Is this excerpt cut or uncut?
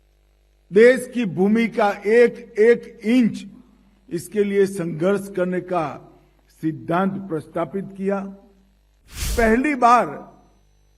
cut